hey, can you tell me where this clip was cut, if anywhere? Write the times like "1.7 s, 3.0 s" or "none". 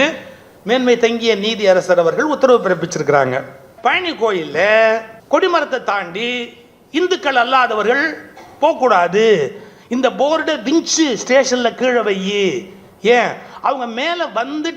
3.7 s, 5.1 s